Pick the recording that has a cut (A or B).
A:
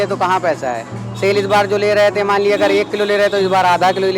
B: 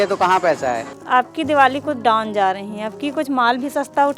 B